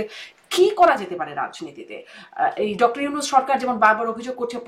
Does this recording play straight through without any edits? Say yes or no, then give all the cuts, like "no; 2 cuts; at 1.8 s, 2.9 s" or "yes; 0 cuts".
yes; 0 cuts